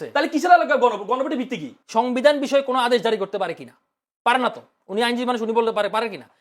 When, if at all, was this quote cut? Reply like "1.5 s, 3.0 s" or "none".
1.7 s